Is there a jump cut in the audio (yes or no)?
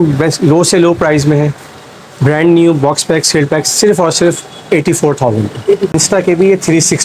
yes